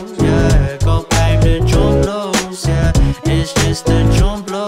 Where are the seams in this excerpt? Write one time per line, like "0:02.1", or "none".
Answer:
0:01.1